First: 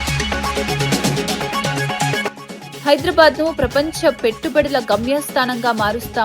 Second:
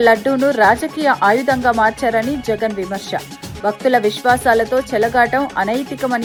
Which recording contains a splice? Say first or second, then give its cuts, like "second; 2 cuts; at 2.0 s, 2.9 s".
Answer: first; 1 cut; at 2.4 s